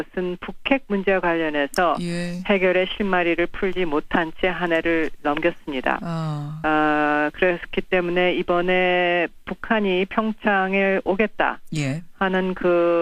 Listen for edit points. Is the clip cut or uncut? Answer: uncut